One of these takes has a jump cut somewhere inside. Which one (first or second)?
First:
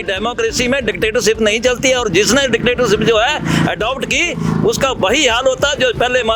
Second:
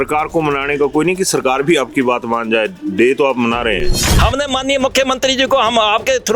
second